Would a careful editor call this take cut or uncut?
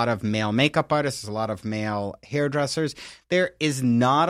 uncut